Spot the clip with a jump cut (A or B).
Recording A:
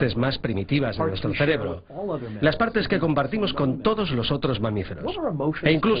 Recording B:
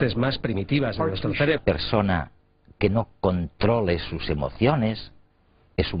A